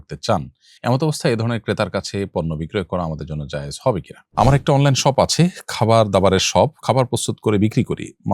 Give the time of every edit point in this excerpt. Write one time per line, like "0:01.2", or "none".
0:04.2